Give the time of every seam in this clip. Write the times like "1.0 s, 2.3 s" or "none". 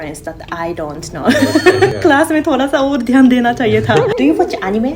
1.9 s, 4.1 s